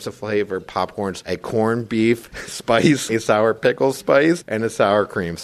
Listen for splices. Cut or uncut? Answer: cut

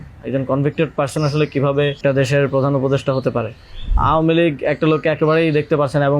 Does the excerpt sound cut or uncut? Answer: cut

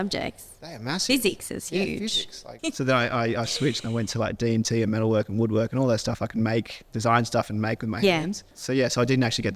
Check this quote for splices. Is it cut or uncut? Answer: cut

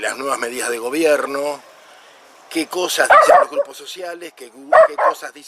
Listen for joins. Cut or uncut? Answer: cut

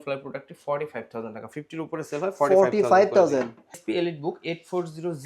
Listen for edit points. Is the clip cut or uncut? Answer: cut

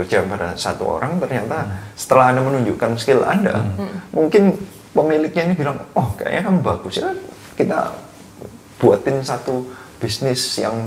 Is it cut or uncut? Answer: uncut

